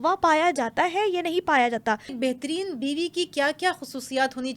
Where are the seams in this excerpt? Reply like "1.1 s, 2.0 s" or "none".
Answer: 2.1 s